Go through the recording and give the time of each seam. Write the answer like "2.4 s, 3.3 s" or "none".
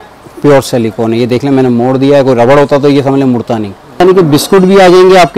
4.0 s

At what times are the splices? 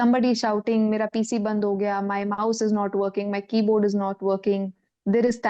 none

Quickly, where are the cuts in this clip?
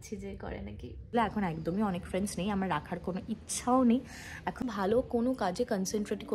1.1 s, 4.6 s

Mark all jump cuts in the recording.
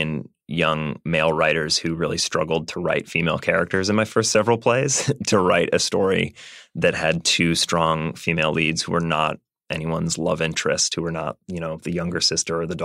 none

